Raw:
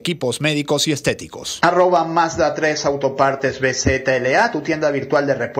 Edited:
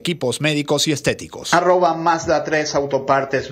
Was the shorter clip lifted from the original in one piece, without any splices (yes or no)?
no